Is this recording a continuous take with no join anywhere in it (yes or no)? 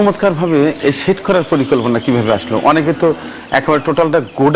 yes